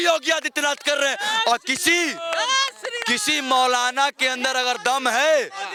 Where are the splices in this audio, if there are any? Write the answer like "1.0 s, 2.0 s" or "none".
none